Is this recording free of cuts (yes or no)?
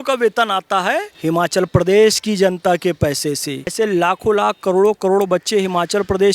no